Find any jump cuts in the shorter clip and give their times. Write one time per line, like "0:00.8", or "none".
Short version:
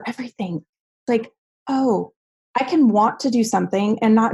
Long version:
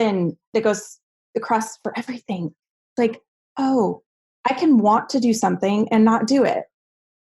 none

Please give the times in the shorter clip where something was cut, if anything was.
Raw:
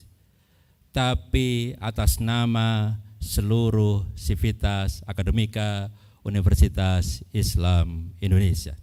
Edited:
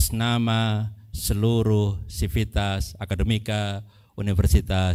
none

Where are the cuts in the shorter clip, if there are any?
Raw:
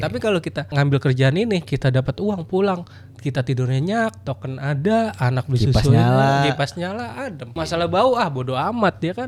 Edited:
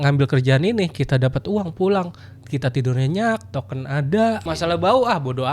0:04.4

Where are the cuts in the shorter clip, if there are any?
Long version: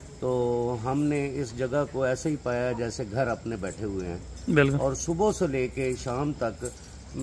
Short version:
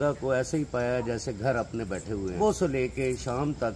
0:02.4

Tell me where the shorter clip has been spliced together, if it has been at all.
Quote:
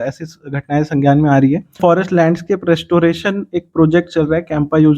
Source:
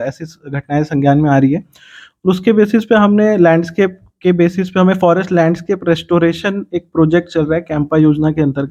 0:01.8

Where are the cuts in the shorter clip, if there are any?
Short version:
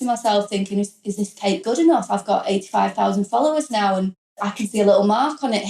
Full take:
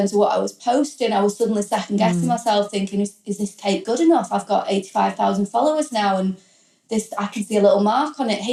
0:04.4

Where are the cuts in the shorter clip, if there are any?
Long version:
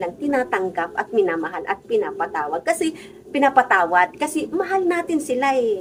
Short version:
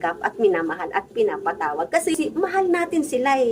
0:02.2

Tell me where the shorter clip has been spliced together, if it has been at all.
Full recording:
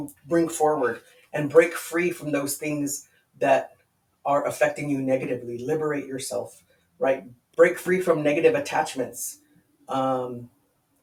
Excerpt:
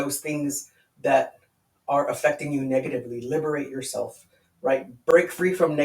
0:04.9

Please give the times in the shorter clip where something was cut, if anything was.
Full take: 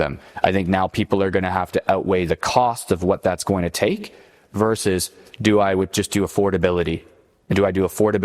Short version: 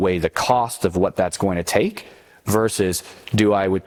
none

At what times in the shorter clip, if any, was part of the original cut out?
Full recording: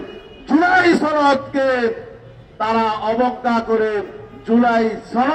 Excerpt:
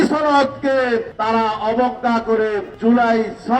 0:01.1
0:02.7

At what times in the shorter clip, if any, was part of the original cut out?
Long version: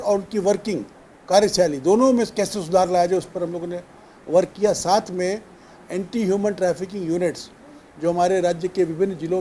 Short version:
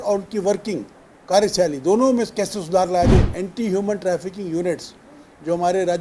0:03.3

